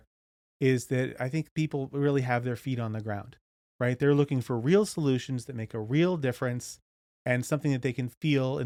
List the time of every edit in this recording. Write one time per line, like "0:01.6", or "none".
none